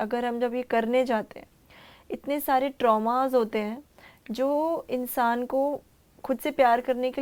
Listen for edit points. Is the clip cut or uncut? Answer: uncut